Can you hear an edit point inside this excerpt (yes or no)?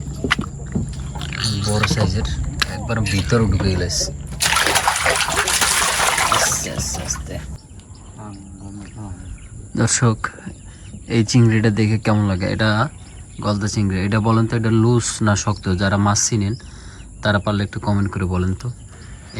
yes